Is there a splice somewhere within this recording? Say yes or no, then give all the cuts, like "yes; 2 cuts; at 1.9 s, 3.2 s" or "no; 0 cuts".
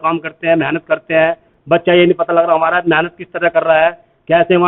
no; 0 cuts